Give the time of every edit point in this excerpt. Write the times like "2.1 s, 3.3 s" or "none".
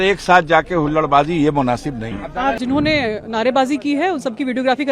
2.6 s